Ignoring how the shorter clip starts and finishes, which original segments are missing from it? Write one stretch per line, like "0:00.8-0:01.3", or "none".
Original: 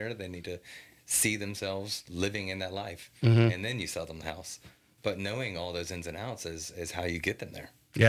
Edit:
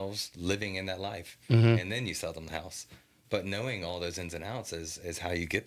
none

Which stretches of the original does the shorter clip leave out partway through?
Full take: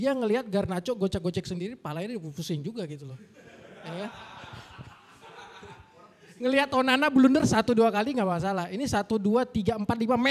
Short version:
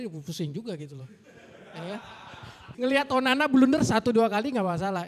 0:04.7-0:06.2

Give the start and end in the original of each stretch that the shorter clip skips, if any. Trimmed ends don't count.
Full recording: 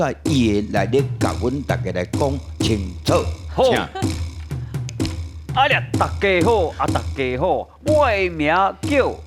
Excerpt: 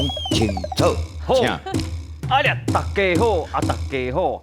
0:03.9-0:04.9

